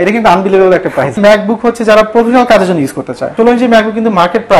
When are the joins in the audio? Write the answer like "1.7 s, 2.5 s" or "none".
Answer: 1.2 s, 3.2 s